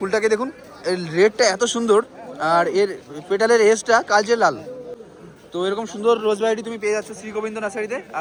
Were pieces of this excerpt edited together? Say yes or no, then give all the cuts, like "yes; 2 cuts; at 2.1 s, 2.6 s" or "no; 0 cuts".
no; 0 cuts